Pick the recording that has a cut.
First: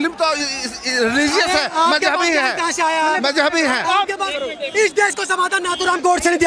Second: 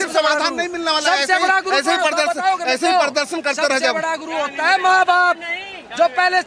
first; 1 cut; at 4.3 s

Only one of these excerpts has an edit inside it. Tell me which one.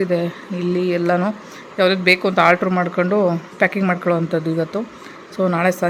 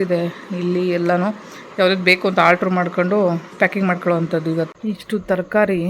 second; 1 cut; at 4.7 s

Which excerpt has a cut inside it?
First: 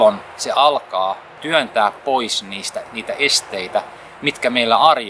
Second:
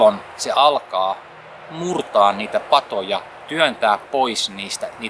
first; 1 cut; at 1.3 s

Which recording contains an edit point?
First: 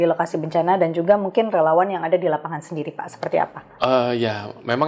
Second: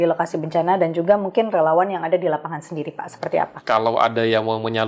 second; 1 cut; at 3.6 s

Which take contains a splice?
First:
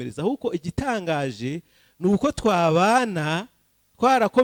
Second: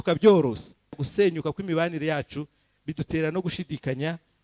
second; 1 cut; at 1.0 s

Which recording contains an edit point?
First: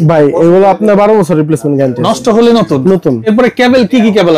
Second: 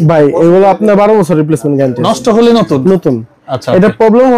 first; 1 cut; at 3.3 s

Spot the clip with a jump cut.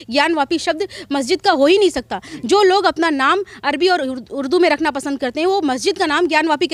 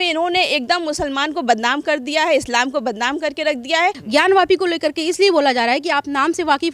second; 1 cut; at 4.0 s

